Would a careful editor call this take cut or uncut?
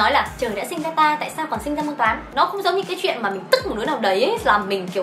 cut